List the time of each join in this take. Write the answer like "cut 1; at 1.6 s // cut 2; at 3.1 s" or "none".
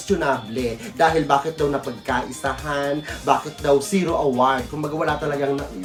none